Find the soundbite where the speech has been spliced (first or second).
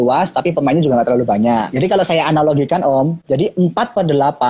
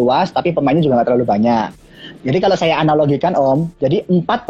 first